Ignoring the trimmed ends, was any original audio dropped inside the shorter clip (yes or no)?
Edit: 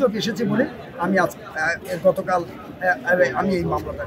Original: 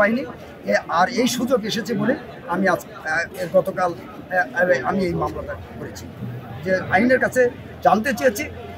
no